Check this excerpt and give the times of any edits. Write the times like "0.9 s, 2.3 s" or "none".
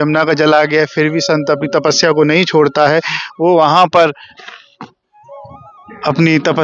none